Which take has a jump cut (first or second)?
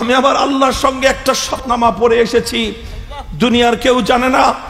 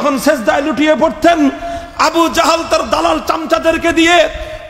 first